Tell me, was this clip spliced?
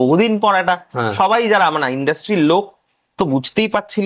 no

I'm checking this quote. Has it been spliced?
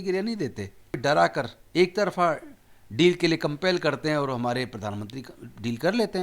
yes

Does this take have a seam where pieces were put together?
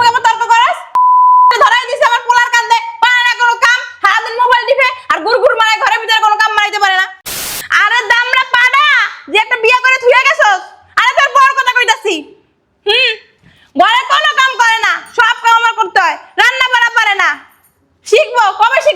yes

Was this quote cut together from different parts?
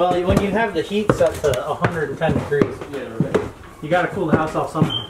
no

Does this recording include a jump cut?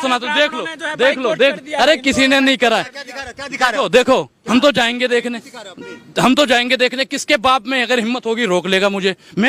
no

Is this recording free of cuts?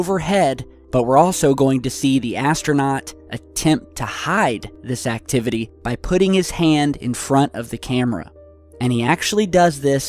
no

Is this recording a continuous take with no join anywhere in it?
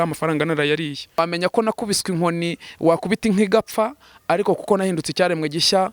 no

